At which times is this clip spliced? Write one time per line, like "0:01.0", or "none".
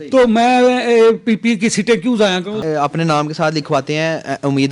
0:02.6